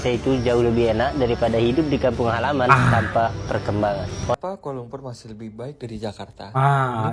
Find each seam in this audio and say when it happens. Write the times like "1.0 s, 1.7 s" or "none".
4.3 s